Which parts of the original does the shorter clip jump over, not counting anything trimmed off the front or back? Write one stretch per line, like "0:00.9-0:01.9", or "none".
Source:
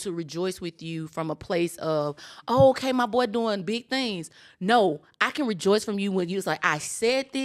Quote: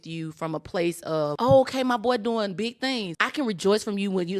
0:02.1-0:02.4
0:04.3-0:05.2